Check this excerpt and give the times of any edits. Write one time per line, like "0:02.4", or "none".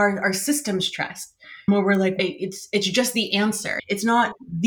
0:03.7